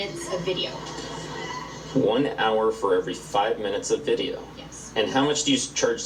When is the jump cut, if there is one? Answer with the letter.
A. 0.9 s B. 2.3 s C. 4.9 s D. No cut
D